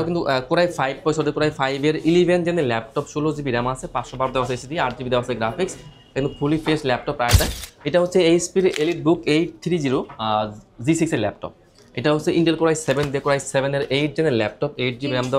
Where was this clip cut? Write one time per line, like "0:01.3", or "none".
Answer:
0:07.3

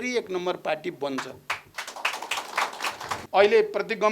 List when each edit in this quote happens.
0:03.2

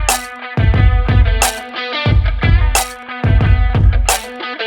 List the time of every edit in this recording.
none

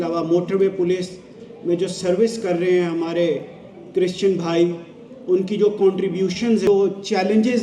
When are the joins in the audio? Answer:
0:06.7

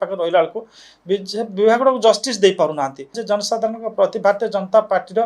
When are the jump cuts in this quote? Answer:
0:03.2

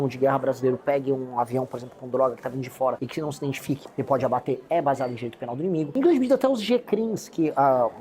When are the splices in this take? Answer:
0:03.4
0:05.9

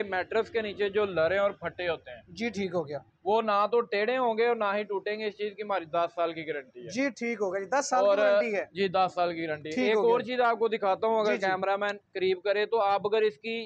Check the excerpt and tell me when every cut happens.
none

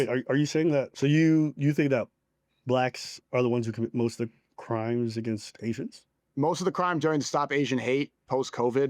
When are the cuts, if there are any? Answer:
0:00.9

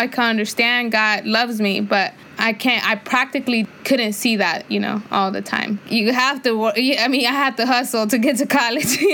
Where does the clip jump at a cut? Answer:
0:02.2
0:03.7
0:05.8

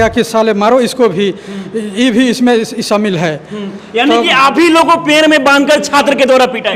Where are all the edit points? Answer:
none

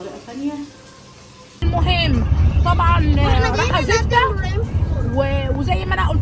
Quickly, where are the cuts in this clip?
0:01.6

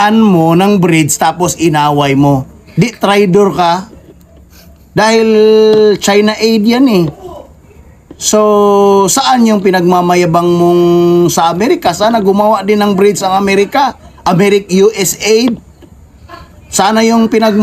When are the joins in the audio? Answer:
none

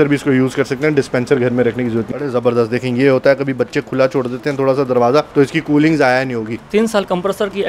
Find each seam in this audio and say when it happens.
0:02.1
0:05.3
0:06.5

